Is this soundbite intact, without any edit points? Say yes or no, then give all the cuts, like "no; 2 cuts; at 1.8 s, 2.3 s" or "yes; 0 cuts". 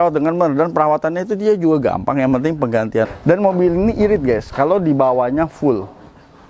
no; 1 cut; at 3.1 s